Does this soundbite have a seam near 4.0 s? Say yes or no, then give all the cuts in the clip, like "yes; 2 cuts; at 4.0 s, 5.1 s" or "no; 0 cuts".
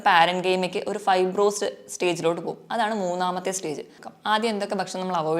yes; 1 cut; at 4.0 s